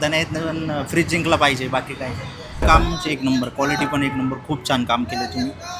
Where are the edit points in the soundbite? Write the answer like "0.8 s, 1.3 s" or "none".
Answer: 2.6 s